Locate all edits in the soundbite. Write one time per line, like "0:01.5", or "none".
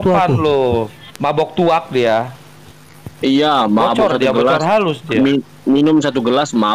0:01.0